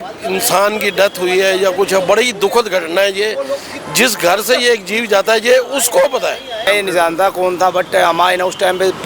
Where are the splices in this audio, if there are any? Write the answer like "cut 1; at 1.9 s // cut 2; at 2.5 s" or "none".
cut 1; at 6.7 s